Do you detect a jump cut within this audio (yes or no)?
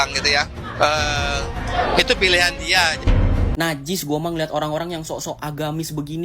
yes